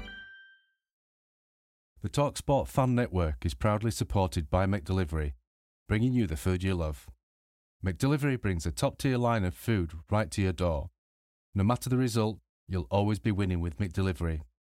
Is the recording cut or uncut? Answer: cut